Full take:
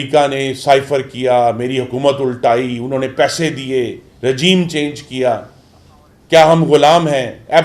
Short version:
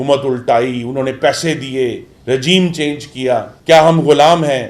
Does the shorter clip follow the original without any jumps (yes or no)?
no